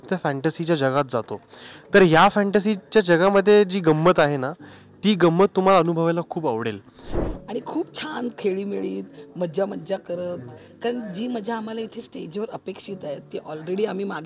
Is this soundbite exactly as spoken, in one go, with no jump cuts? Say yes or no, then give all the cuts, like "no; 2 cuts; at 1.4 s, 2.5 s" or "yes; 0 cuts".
no; 1 cut; at 7.1 s